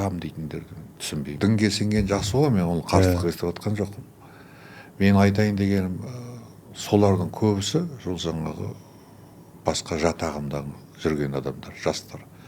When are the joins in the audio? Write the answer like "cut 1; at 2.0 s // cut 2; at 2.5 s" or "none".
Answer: cut 1; at 1.3 s